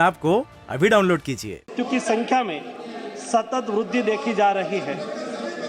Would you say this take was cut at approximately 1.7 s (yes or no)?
yes